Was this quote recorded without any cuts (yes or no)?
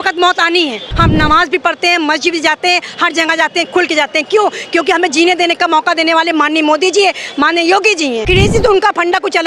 no